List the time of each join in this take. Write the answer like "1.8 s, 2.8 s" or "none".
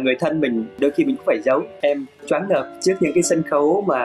1.8 s

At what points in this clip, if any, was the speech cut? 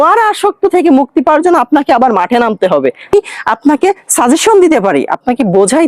3.1 s

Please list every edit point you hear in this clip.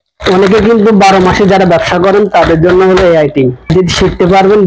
3.7 s

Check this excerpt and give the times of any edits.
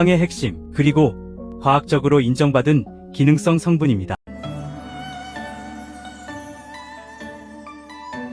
4.2 s

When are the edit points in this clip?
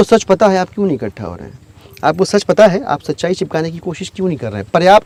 none

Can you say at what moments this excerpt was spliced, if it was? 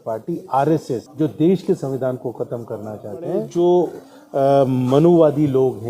1.1 s, 3.5 s

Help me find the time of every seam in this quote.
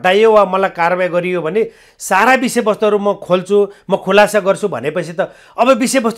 none

